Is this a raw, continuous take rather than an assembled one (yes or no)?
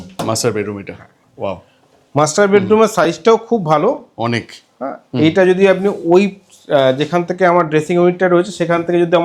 yes